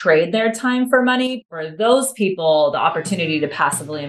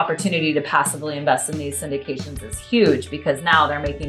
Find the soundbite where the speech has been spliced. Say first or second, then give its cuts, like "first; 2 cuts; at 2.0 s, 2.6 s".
first; 1 cut; at 1.4 s